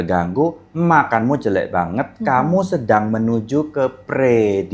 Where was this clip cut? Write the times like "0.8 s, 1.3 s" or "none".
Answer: none